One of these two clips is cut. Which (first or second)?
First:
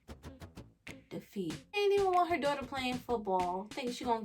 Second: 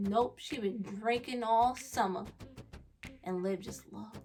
first